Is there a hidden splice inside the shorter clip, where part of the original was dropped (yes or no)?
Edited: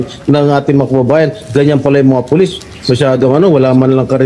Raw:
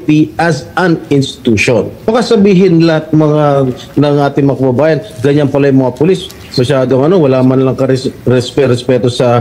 no